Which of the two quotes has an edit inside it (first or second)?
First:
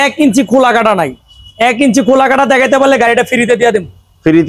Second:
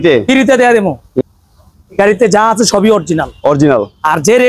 second